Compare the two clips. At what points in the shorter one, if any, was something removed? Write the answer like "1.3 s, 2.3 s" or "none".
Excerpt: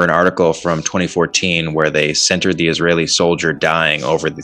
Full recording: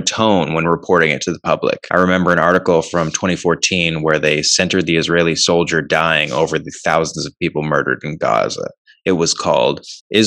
none